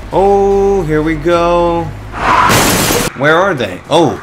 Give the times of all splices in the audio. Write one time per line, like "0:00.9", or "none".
0:03.0